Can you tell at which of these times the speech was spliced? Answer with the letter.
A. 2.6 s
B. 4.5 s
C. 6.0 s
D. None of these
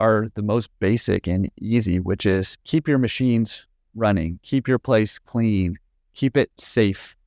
A